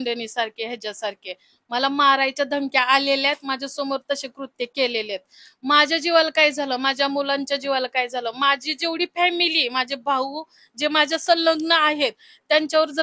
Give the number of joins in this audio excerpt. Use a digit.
0